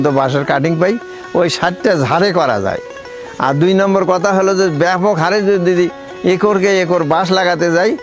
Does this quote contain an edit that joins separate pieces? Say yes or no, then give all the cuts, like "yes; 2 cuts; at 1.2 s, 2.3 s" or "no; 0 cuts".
no; 0 cuts